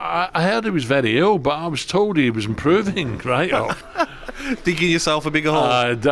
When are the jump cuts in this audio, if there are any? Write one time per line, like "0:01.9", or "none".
0:03.8